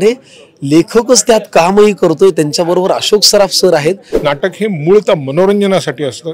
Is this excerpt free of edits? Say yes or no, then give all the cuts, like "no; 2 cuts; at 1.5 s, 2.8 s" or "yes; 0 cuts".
no; 1 cut; at 4.1 s